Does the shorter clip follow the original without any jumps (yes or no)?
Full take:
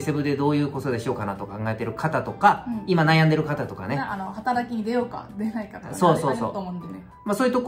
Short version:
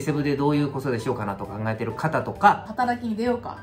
no